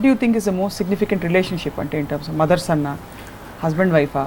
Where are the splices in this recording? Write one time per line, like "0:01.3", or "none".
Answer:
none